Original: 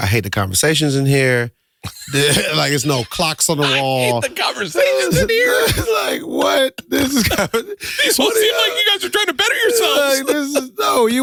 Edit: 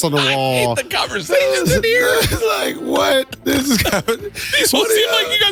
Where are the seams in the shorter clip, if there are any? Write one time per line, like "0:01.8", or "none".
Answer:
none

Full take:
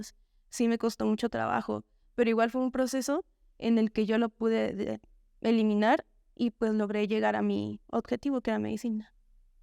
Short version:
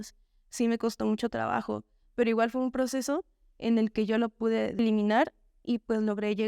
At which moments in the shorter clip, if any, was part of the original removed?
0:04.8

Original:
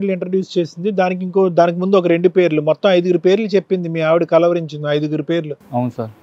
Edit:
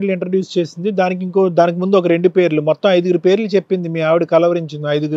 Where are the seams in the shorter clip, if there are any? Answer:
none

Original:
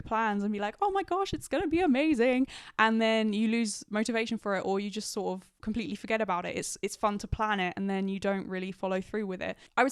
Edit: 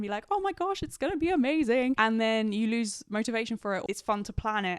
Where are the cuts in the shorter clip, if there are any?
0:02.0
0:03.8

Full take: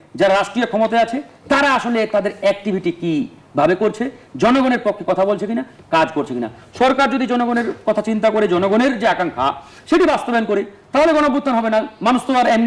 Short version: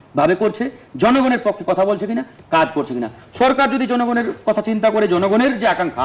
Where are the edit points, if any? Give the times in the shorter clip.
none

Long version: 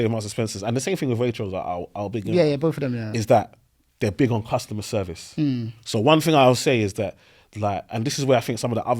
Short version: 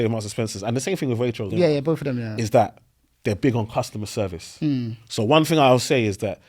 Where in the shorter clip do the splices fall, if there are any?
0:01.5

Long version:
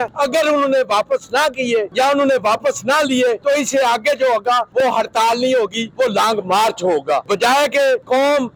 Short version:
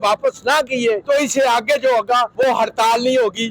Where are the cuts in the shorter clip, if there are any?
0:01.0

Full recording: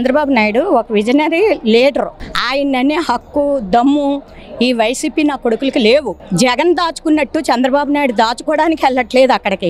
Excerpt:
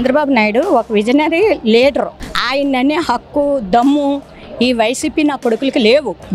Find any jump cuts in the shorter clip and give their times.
none

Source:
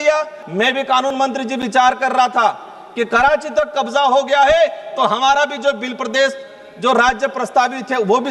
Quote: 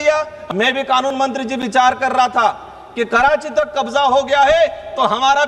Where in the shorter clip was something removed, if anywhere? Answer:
none

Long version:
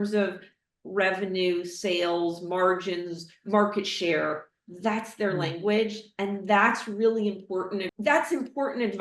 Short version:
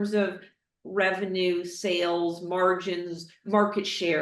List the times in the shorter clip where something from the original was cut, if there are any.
none

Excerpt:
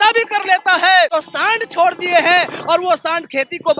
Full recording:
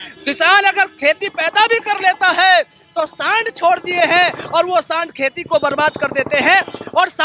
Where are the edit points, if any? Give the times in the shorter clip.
0:01.1

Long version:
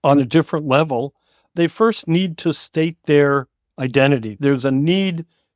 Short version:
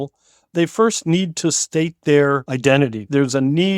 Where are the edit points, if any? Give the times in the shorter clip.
0:02.5

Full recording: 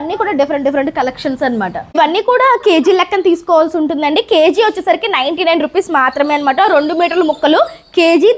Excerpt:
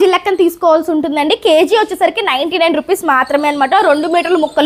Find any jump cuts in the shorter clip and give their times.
none

